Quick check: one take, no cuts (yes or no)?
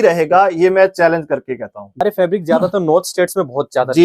no